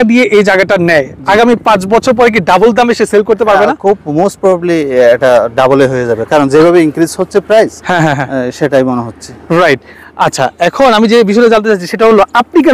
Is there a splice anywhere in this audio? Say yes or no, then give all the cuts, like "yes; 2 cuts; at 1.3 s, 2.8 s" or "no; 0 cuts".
no; 0 cuts